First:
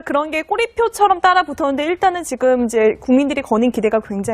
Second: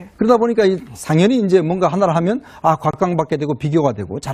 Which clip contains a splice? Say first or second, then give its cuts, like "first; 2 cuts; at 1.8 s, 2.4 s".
first; 1 cut; at 1.5 s